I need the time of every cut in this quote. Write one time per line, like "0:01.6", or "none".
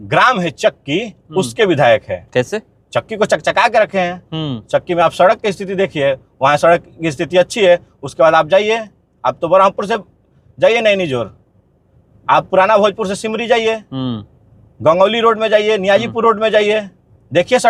none